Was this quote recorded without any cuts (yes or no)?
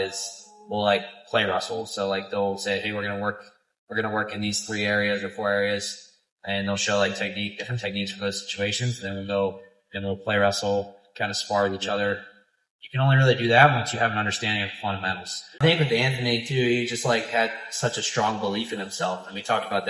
no